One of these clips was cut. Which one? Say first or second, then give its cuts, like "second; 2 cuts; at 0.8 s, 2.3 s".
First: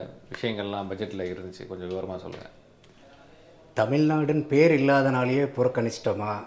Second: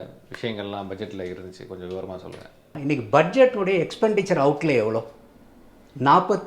second; 1 cut; at 2.7 s